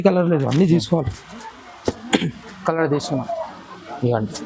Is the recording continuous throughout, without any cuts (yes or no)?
yes